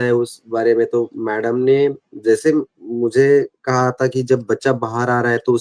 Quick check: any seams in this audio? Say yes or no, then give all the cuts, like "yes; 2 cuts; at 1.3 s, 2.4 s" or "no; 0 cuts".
no; 0 cuts